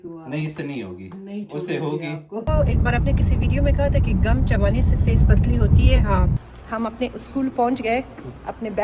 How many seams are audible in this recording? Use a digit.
2